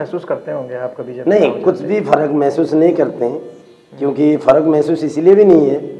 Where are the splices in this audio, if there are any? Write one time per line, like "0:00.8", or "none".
none